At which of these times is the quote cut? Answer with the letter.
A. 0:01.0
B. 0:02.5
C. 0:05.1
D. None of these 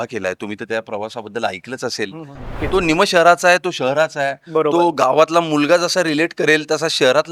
B